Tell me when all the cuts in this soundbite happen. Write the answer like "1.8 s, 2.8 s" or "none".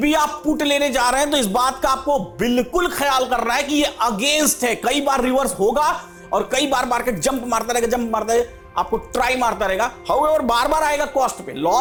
none